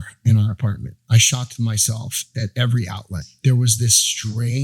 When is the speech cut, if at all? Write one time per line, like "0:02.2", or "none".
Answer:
0:01.0
0:02.2
0:03.1

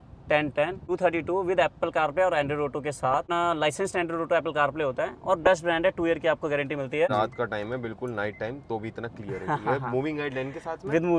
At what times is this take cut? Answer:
0:00.8
0:03.3
0:07.1

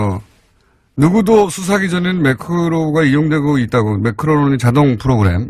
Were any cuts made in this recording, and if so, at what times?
0:02.6

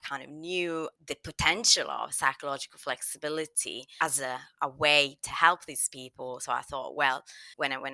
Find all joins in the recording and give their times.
none

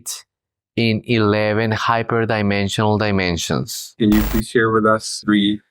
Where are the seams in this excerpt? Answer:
0:03.8

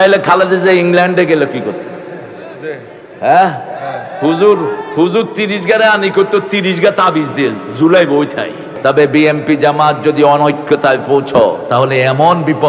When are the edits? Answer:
0:08.7

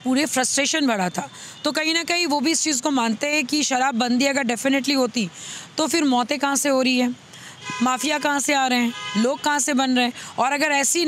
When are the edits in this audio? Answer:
none

